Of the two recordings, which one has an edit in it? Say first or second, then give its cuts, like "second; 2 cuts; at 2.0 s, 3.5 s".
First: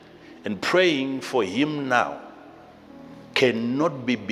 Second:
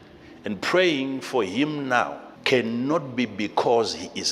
second; 1 cut; at 2.3 s